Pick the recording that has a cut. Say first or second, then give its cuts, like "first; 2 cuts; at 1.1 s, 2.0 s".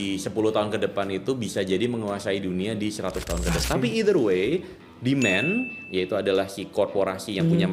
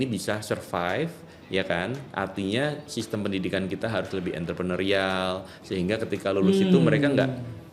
first; 1 cut; at 3.6 s